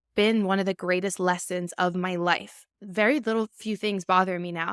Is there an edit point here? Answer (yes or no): yes